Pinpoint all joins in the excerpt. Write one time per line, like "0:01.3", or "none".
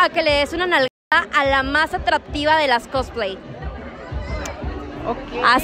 none